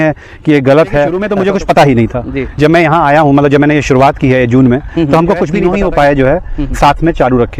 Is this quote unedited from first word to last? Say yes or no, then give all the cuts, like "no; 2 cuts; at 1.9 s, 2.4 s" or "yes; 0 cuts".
no; 2 cuts; at 1.2 s, 5.6 s